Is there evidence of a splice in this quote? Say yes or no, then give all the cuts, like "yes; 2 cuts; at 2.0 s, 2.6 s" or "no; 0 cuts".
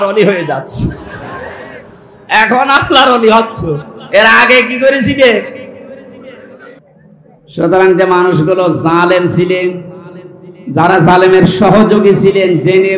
yes; 1 cut; at 6.8 s